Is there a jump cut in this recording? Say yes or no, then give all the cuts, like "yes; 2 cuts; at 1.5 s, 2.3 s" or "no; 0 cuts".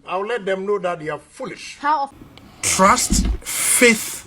yes; 1 cut; at 2.2 s